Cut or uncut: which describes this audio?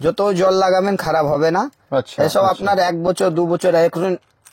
uncut